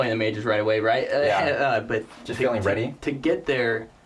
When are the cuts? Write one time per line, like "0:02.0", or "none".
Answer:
none

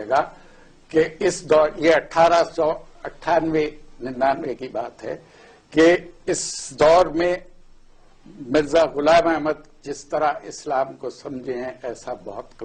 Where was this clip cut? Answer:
none

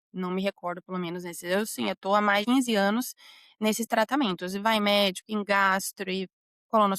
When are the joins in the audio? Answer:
0:02.4

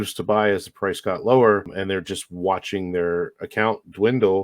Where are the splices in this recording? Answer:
0:01.7

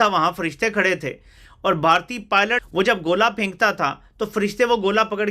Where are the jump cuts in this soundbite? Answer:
0:02.6

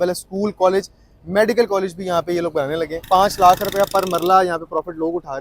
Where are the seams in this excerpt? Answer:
0:03.0

